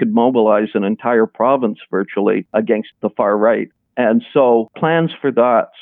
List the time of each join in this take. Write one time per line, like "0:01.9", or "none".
none